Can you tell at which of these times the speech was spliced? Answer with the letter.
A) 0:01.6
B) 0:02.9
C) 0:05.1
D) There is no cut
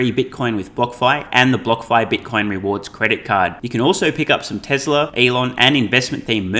C